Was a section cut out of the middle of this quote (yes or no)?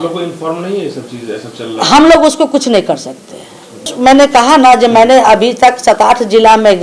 yes